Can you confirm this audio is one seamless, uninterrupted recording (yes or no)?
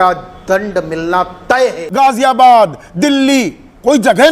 no